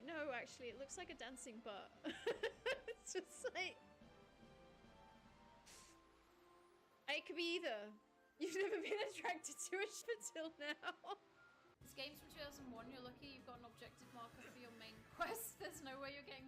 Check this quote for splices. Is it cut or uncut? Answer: cut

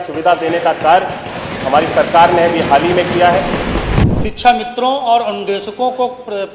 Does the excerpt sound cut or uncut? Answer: cut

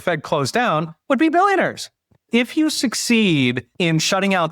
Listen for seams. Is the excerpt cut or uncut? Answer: cut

